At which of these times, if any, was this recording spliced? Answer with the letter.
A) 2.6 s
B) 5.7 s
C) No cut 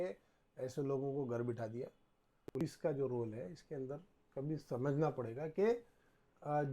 A